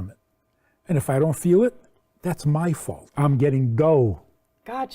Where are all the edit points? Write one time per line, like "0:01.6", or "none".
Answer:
0:03.0